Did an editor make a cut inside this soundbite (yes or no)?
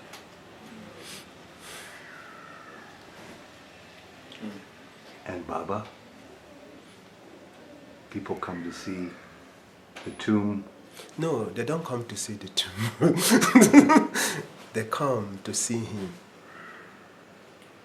no